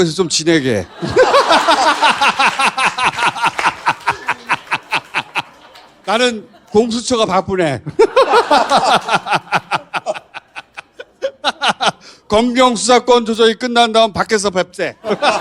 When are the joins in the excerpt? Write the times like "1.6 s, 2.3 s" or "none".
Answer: none